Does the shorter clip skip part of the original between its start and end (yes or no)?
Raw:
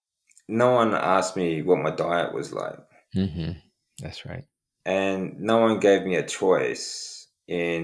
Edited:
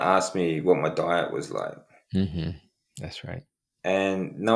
no